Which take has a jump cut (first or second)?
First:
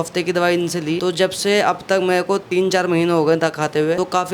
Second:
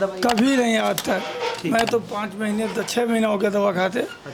first